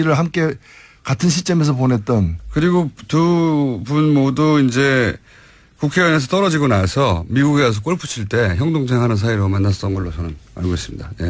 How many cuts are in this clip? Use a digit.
1